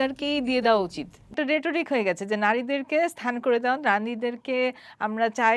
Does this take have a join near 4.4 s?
no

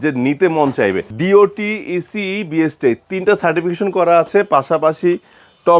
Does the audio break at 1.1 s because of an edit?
yes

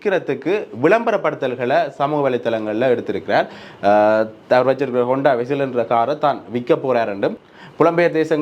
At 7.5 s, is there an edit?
yes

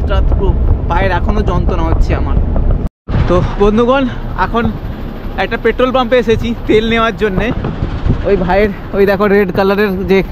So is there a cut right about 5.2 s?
no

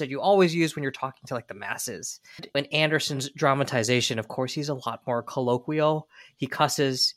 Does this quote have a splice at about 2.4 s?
yes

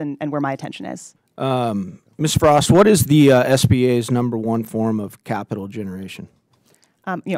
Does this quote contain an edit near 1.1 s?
yes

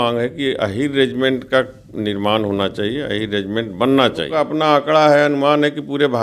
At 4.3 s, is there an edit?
yes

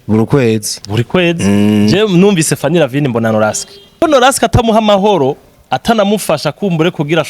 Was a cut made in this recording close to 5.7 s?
no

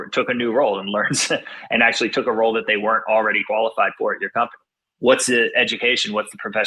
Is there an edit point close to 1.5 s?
no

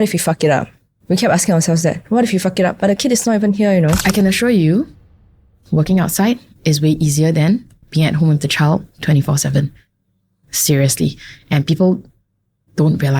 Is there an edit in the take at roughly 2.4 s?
no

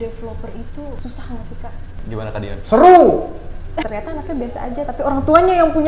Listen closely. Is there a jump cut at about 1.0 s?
yes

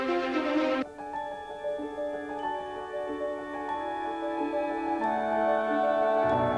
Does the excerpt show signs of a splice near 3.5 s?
no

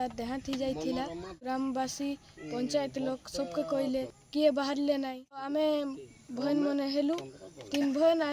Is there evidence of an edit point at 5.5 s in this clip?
yes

